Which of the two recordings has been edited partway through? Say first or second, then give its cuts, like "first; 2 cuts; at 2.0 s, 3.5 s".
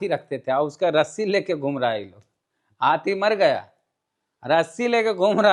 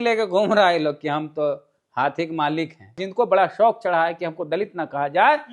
second; 1 cut; at 3.0 s